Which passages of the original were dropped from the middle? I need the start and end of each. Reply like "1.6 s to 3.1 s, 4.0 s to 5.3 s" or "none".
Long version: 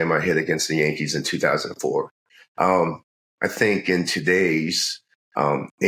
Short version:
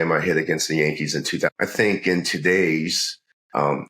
1.5 s to 3.3 s